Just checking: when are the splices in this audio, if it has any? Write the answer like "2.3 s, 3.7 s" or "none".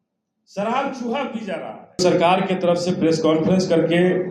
2.0 s